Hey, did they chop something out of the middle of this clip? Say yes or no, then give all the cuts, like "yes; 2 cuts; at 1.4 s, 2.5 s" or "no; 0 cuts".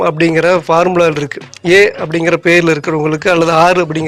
no; 0 cuts